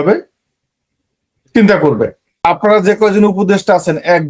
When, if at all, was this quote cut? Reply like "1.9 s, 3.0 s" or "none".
2.4 s